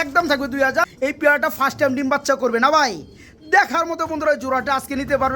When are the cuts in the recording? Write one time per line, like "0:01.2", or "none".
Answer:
0:00.9